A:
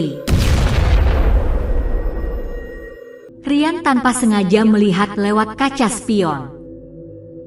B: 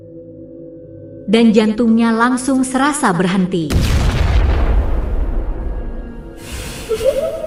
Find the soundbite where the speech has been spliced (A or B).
A